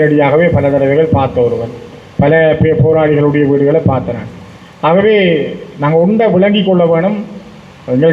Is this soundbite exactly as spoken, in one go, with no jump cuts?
yes; 0 cuts

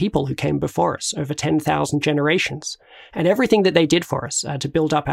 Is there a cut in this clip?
no; 0 cuts

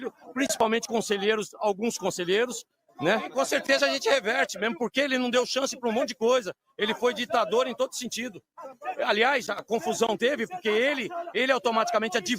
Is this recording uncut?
no; 1 cut; at 3.3 s

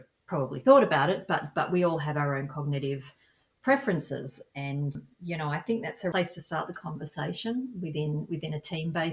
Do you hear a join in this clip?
yes; 2 cuts; at 4.9 s, 6.1 s

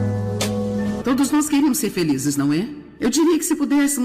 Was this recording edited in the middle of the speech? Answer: yes; 1 cut; at 1.0 s

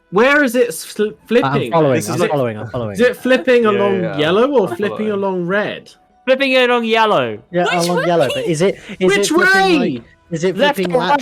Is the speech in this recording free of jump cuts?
yes; 0 cuts

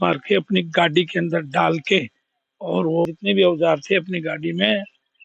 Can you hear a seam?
yes; 1 cut; at 3.1 s

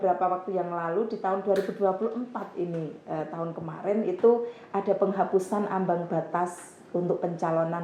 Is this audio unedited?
yes; 0 cuts

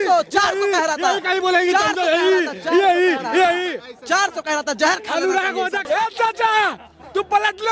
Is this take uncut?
no; 1 cut; at 5.8 s

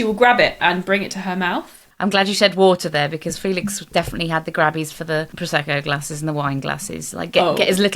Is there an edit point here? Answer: yes; 1 cut; at 1.9 s

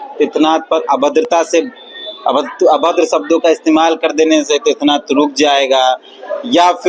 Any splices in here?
no; 0 cuts

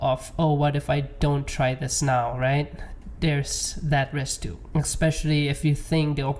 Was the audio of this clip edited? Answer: yes; 1 cut; at 4.6 s

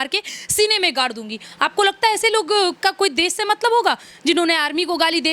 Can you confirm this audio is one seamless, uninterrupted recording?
yes; 0 cuts

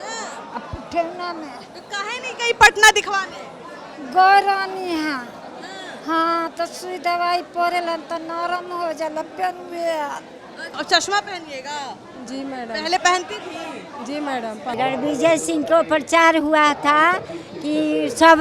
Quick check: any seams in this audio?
yes; 2 cuts; at 10.7 s, 14.7 s

